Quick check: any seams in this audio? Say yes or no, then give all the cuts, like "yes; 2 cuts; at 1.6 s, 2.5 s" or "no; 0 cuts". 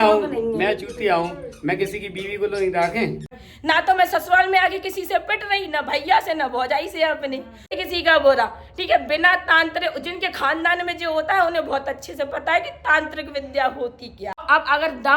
yes; 3 cuts; at 3.3 s, 7.7 s, 14.4 s